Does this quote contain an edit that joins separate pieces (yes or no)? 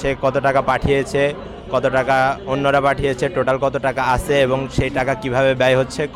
no